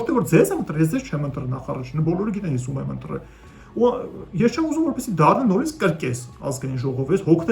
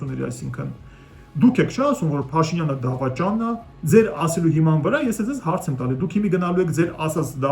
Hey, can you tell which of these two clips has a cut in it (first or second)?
second